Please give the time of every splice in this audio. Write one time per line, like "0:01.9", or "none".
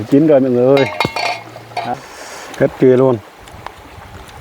0:01.9